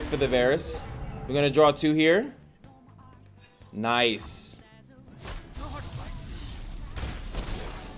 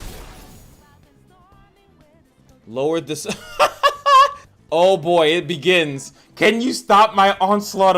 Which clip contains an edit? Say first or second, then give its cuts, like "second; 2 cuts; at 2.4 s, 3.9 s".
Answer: second; 1 cut; at 4.5 s